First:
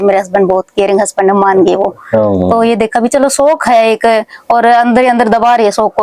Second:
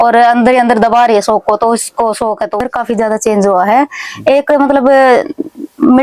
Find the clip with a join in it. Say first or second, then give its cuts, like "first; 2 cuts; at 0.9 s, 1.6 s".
second; 1 cut; at 2.6 s